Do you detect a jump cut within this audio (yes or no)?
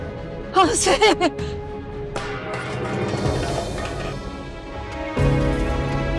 yes